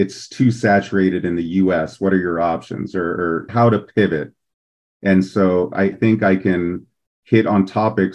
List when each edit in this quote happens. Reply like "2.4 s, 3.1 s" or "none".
3.5 s, 5.9 s